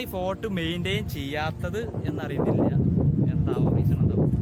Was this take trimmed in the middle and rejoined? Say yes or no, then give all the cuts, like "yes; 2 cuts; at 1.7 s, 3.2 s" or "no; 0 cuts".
no; 0 cuts